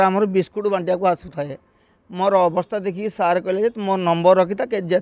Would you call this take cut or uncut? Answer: uncut